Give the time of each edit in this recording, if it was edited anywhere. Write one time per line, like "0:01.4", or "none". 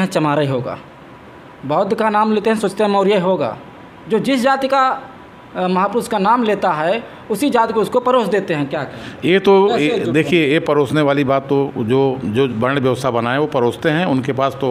none